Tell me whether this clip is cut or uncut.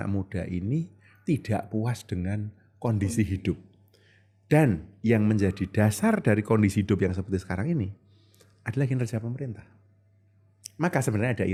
uncut